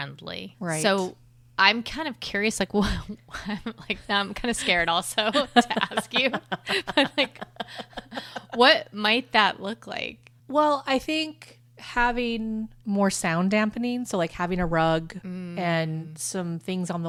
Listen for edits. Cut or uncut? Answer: uncut